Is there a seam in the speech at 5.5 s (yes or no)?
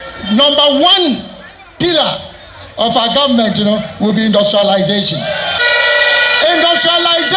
yes